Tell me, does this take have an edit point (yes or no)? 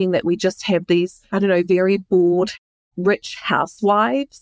yes